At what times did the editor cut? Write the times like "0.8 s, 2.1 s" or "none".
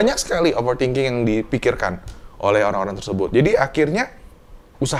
none